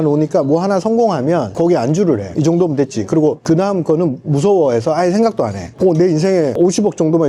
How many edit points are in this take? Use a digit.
3